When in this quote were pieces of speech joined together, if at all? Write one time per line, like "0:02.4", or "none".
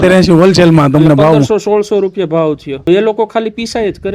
0:02.9